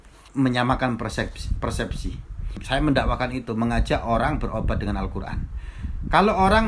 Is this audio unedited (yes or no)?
no